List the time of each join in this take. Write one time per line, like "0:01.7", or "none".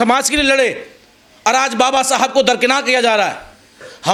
none